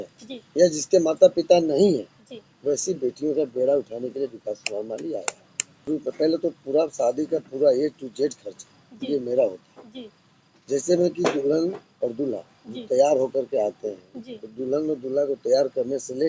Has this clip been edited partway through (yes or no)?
yes